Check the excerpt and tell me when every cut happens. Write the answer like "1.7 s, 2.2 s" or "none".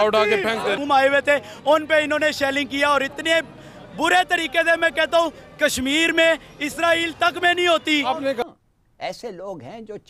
0.8 s, 8.4 s